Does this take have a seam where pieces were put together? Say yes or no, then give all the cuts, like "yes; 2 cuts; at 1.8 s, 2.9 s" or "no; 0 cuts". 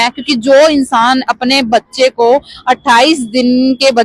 no; 0 cuts